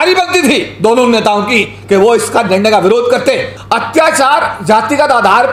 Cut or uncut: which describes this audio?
cut